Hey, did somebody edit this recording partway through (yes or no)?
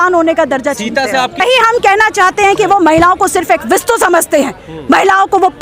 yes